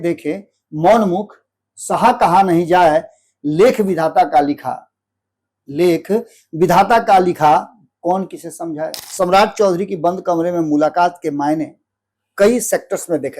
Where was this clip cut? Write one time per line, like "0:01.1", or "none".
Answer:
0:09.0